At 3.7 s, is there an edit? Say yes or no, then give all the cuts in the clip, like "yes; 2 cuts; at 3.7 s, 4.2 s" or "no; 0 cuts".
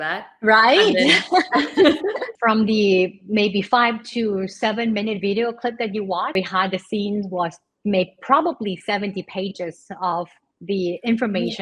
no; 2 cuts; at 2.3 s, 6.3 s